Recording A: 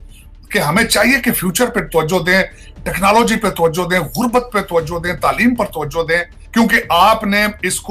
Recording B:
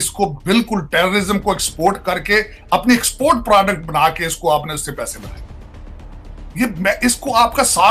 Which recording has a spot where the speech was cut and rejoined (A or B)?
A